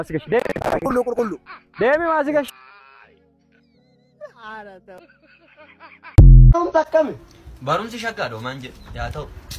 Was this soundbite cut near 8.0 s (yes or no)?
no